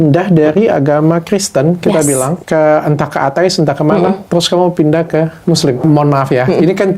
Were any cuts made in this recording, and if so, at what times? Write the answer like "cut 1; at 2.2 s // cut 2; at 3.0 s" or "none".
cut 1; at 2.4 s // cut 2; at 5.8 s